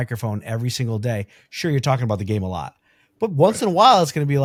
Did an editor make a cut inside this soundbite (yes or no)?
no